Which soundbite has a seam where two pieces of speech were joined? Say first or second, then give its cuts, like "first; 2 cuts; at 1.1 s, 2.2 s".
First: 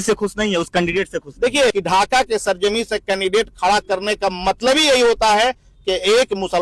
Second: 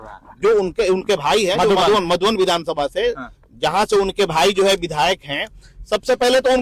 first; 1 cut; at 1.7 s